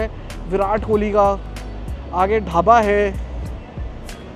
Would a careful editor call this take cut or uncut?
uncut